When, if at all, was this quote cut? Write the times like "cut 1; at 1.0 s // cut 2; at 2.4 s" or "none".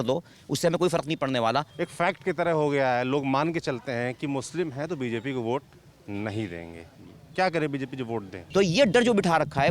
cut 1; at 1.8 s // cut 2; at 8.3 s